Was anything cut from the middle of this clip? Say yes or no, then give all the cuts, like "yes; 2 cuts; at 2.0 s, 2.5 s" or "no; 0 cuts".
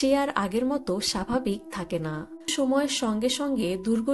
yes; 1 cut; at 2.5 s